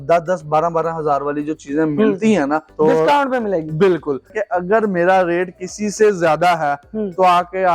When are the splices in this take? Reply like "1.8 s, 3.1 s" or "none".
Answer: 2.7 s, 4.4 s

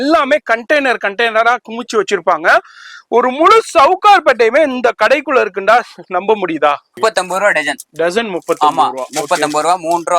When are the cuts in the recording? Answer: 7.0 s

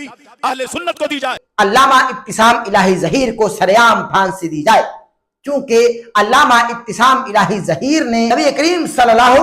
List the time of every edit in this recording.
1.4 s, 8.3 s

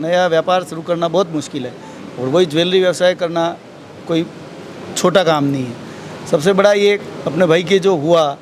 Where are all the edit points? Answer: none

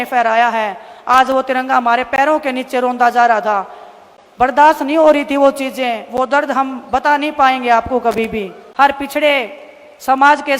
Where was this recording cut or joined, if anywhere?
8.6 s

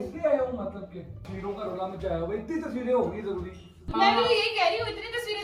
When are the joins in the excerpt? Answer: 1.3 s, 3.8 s

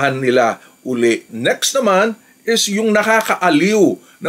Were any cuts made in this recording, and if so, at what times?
1.3 s

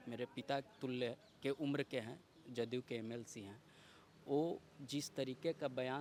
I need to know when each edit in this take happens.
none

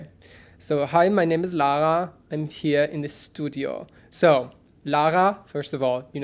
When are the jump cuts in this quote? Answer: none

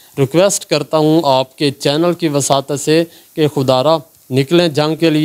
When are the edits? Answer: none

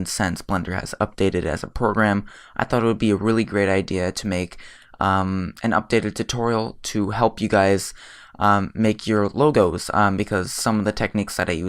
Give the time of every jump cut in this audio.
8.2 s

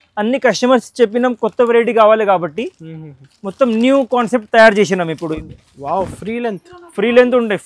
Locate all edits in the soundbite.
5.4 s

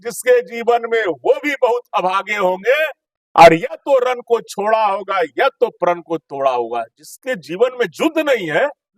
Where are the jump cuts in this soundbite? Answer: none

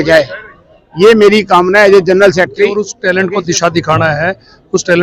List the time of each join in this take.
2.9 s

